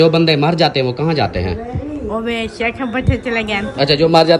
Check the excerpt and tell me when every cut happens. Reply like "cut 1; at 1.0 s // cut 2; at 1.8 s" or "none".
none